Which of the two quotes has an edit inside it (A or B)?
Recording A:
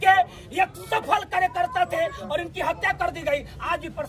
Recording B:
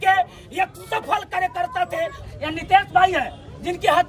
B